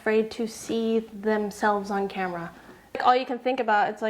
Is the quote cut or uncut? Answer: cut